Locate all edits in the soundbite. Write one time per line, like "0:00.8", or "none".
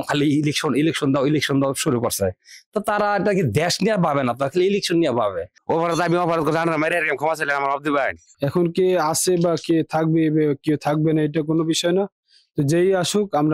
0:05.5
0:08.2

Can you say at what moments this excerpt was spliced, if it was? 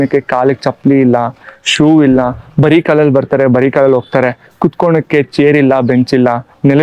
none

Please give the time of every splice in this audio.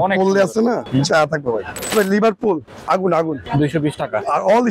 0:00.8
0:01.9
0:03.4

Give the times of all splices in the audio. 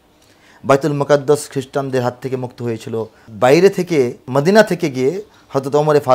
0:03.3
0:04.3

